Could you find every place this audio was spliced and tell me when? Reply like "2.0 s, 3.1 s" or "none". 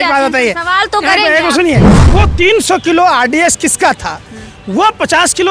1.9 s